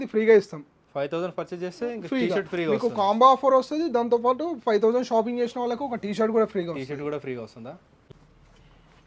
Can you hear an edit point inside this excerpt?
yes; 1 cut; at 8.0 s

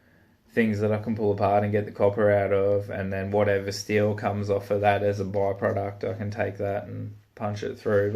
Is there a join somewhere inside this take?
no; 0 cuts

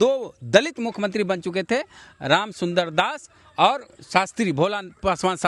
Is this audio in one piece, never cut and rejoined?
yes; 0 cuts

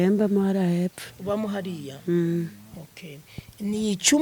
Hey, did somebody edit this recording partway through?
no; 0 cuts

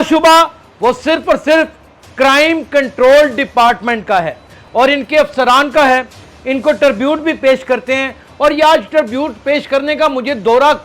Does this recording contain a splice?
no; 0 cuts

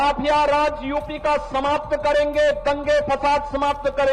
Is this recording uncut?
yes; 0 cuts

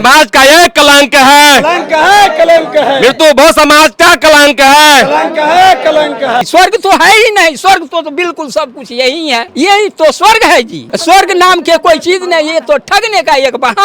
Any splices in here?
yes; 3 cuts; at 6.4 s, 9.5 s, 10.8 s

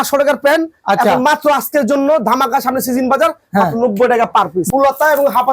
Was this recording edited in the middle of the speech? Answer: yes; 1 cut; at 4.6 s

